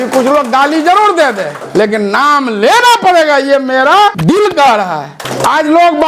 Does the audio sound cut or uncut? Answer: cut